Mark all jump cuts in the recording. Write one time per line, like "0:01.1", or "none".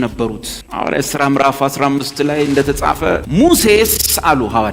0:03.2